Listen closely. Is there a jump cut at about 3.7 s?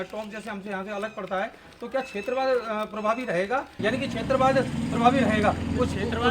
yes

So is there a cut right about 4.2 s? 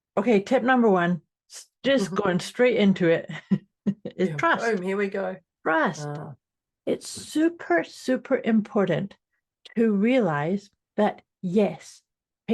no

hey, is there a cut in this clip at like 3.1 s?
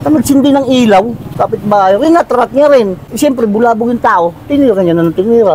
no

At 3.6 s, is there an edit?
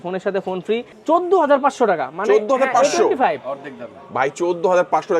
no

